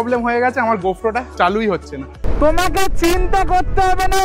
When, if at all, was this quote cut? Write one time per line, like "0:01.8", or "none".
0:01.3
0:02.2